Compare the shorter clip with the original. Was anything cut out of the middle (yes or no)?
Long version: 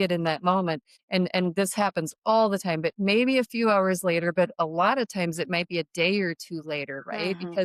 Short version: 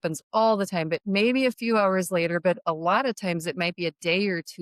no